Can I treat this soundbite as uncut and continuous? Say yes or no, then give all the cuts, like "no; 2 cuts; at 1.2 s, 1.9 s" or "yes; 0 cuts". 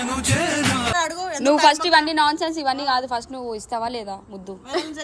no; 1 cut; at 0.9 s